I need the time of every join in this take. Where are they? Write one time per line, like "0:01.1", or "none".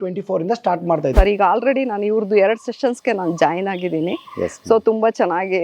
0:01.1